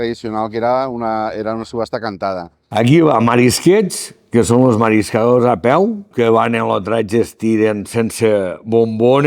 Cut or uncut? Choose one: cut